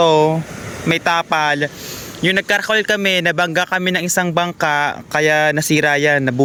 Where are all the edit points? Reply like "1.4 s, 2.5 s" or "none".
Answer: none